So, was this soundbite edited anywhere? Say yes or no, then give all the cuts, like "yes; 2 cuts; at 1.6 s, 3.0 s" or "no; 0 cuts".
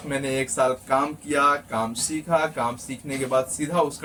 no; 0 cuts